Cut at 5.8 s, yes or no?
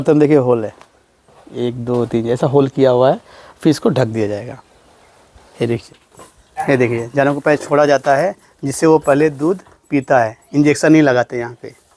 yes